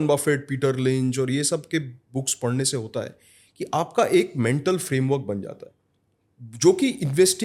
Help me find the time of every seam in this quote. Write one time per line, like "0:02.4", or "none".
none